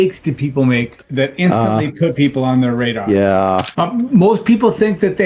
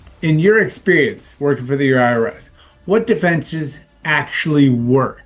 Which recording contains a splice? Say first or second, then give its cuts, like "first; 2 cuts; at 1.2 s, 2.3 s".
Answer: first; 2 cuts; at 1.0 s, 3.7 s